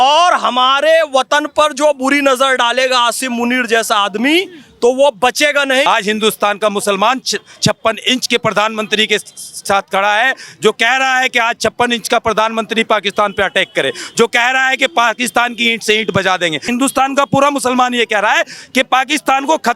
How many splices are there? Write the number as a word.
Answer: two